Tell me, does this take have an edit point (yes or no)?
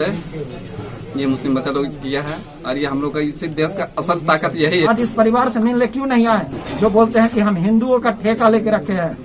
yes